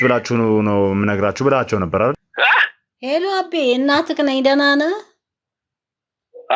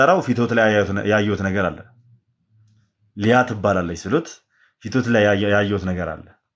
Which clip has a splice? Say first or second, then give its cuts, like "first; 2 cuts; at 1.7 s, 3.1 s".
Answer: first; 1 cut; at 2.3 s